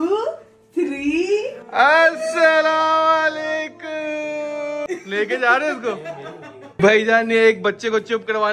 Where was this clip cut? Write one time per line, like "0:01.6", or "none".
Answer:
0:04.8
0:06.6